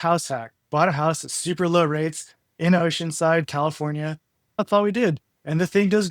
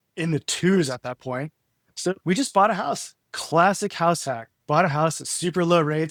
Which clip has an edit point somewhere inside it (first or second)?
first